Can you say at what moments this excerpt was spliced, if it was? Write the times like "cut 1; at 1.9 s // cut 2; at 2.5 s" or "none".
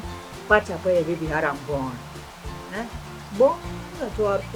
none